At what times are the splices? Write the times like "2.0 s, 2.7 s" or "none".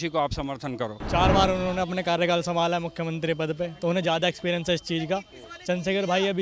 1.0 s